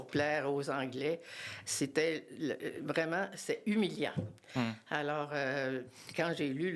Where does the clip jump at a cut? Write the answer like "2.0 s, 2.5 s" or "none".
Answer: none